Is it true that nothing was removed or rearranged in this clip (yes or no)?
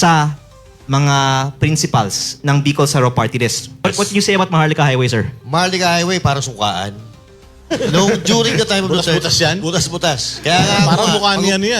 no